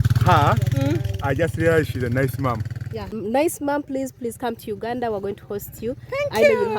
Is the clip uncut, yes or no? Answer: no